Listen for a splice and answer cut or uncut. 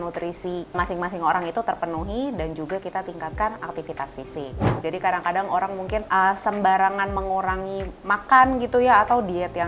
cut